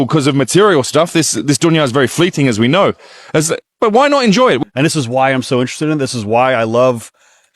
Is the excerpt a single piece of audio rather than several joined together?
no; 1 cut; at 4.6 s

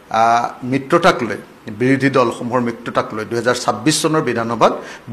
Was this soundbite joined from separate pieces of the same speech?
no; 0 cuts

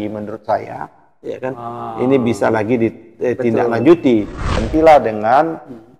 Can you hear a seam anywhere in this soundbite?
yes; 1 cut; at 4.6 s

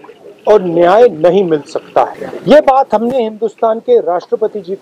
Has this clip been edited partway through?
yes; 1 cut; at 2.3 s

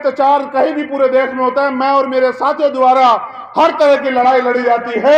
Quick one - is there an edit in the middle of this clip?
no; 0 cuts

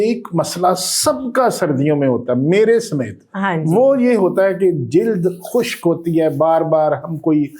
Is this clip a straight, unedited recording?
yes; 0 cuts

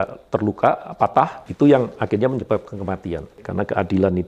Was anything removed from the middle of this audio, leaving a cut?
yes; 2 cuts; at 1.4 s, 3.4 s

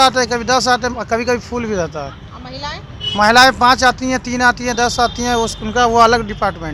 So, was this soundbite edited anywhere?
no; 0 cuts

